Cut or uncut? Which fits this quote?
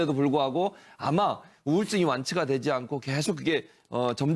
uncut